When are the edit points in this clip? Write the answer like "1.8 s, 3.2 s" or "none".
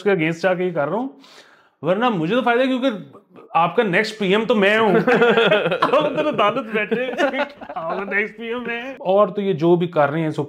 8.9 s